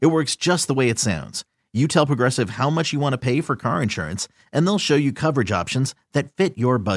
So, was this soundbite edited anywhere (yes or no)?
no